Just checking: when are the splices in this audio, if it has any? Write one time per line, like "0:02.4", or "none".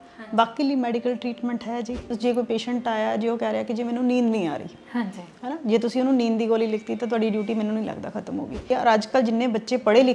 0:02.1
0:08.7